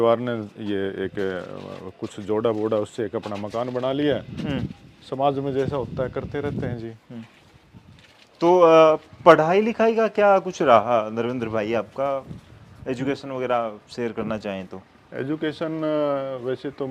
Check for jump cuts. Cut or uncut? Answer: uncut